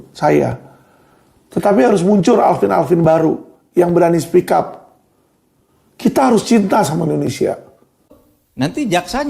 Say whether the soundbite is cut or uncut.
cut